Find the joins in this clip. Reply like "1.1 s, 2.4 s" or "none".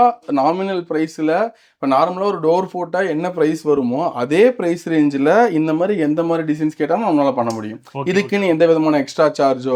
none